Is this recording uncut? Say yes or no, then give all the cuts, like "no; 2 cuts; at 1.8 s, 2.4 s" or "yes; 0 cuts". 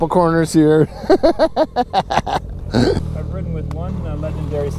no; 1 cut; at 3.1 s